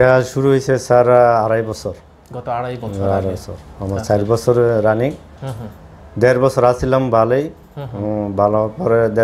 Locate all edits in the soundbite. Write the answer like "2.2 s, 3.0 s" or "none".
none